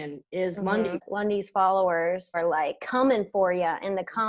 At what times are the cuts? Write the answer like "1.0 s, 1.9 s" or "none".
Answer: 1.1 s, 2.4 s